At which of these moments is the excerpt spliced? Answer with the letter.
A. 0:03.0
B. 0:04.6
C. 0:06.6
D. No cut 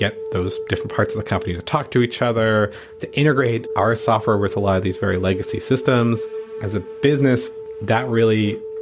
C